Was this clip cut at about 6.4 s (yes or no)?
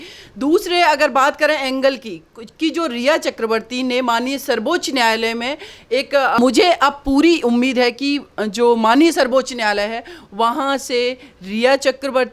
yes